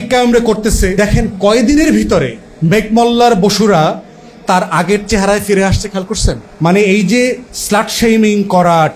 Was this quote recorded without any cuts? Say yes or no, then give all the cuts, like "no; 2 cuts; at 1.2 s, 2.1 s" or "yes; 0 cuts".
no; 2 cuts; at 0.9 s, 6.5 s